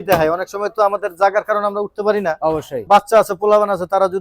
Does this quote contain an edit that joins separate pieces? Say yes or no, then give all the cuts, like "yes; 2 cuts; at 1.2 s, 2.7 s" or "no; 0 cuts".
yes; 1 cut; at 2.8 s